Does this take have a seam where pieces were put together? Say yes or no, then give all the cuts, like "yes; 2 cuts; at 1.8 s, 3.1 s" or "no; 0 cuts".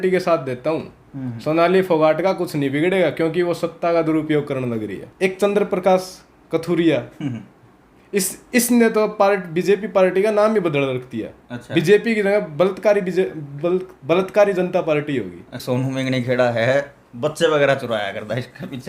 yes; 2 cuts; at 5.0 s, 15.6 s